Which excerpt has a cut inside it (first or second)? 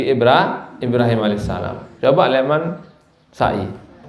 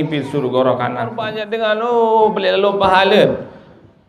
second